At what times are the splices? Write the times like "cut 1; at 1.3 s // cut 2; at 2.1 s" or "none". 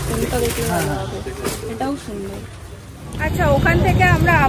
cut 1; at 3.4 s